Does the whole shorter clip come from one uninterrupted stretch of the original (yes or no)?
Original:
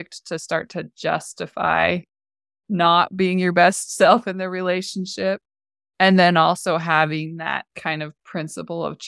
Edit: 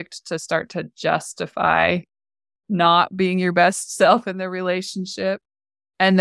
yes